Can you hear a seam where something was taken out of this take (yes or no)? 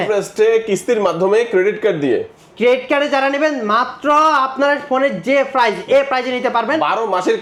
no